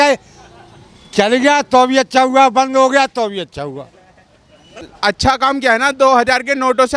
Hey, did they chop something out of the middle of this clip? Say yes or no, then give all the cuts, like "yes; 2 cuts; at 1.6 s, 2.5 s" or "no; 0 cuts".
yes; 1 cut; at 4.8 s